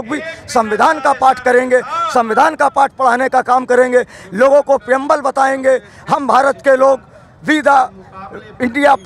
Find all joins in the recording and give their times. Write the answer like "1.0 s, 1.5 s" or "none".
none

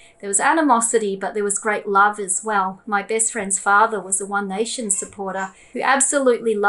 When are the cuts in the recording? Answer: 5.6 s

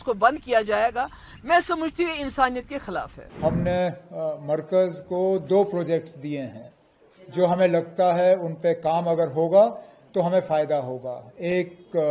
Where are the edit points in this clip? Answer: 3.2 s

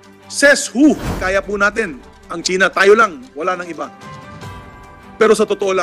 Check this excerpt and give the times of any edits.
1.1 s

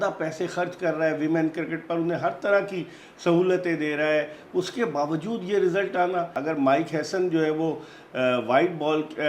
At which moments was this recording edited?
6.4 s

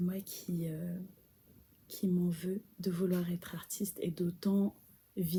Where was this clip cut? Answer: none

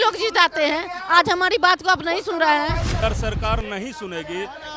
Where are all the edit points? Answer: 3.0 s

